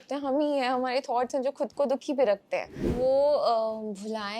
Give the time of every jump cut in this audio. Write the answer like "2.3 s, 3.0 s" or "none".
2.9 s